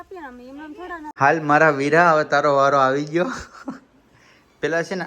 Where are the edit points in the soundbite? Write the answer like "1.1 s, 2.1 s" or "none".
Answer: 1.1 s